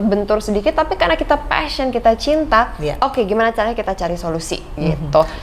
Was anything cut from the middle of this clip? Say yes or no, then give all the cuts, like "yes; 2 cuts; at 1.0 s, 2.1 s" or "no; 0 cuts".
no; 0 cuts